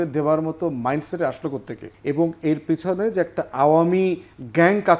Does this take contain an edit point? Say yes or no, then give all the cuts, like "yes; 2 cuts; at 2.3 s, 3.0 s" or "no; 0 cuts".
yes; 1 cut; at 1.8 s